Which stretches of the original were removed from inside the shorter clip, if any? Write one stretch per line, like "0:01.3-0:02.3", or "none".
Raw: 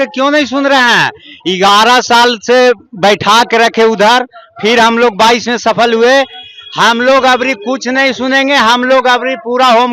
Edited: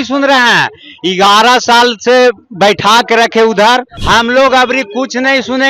0:04.4-0:06.7